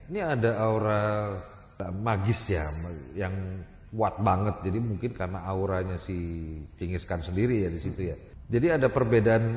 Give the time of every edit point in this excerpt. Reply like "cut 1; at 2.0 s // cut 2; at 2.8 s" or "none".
cut 1; at 1.8 s // cut 2; at 8.3 s